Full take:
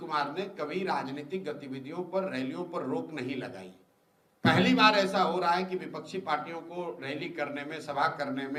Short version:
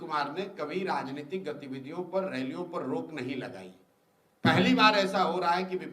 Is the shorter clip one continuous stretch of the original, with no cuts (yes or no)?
yes